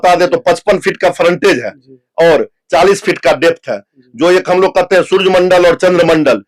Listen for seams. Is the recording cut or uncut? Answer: uncut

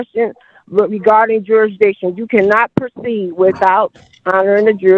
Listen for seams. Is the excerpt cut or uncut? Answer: uncut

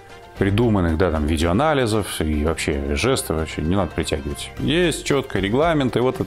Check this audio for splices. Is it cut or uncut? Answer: uncut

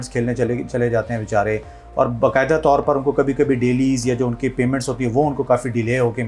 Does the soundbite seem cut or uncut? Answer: uncut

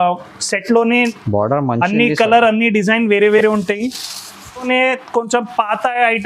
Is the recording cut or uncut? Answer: cut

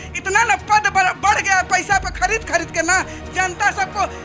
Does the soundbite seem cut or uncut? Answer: uncut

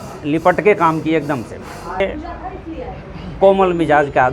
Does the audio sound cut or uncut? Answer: cut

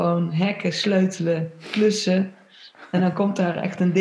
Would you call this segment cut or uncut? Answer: uncut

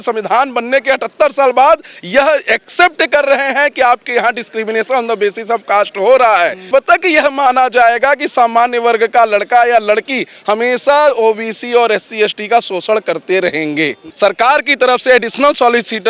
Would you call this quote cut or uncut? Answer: cut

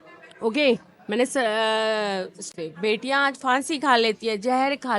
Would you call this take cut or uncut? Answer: cut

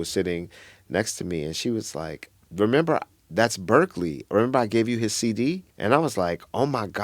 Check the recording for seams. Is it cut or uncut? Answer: cut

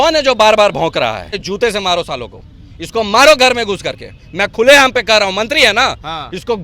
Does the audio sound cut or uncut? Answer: cut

